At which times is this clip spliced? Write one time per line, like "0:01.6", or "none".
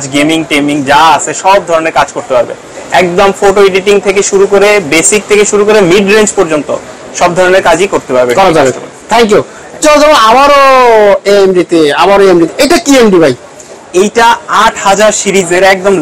none